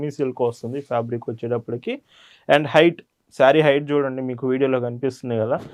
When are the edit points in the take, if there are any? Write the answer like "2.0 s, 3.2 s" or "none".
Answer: none